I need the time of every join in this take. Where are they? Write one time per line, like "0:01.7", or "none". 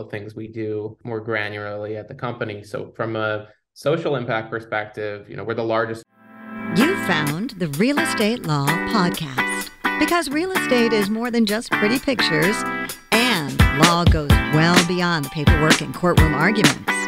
0:01.0
0:06.1